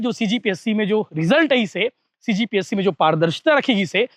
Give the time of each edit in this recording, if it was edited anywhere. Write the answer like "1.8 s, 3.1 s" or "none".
none